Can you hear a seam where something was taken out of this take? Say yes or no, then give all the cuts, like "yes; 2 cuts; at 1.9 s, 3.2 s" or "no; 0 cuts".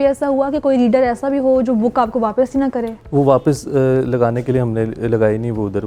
no; 0 cuts